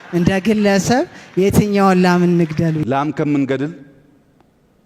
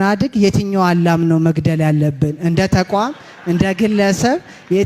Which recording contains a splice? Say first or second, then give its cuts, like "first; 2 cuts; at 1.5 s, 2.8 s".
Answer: first; 1 cut; at 2.8 s